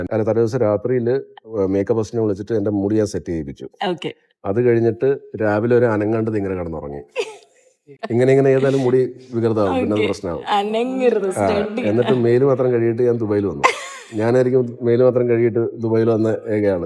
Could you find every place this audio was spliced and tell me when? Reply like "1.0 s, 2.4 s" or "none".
none